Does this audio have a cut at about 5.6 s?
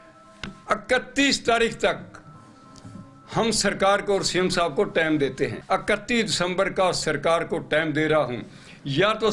yes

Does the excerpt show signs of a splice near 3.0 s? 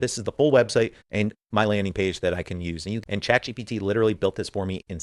yes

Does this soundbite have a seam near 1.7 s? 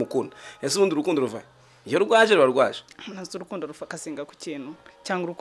no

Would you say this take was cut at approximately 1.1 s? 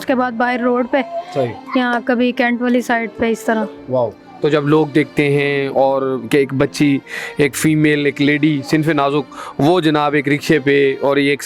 no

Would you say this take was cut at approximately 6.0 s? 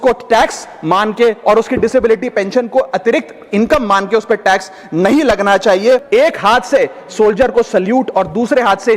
yes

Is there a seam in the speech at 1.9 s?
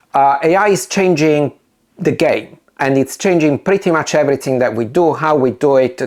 no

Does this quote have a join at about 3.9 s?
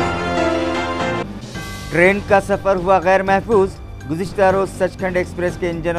no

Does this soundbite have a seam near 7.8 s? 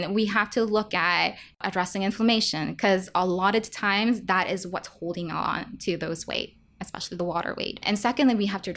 yes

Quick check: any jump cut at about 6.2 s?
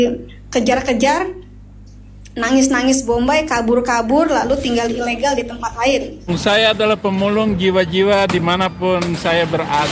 yes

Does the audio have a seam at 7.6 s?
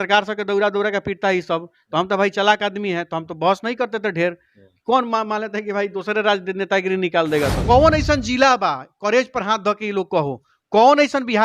yes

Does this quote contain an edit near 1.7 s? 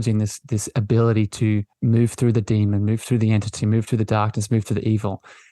yes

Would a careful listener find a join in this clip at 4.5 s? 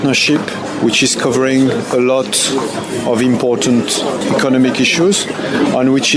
no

